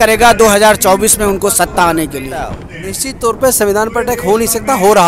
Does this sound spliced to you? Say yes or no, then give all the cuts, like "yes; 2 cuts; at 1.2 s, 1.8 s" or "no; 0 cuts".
yes; 1 cut; at 2.6 s